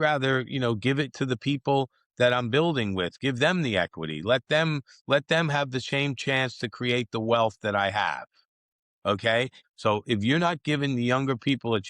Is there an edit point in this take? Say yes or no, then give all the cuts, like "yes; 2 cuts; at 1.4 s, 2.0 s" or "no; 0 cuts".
yes; 1 cut; at 9.6 s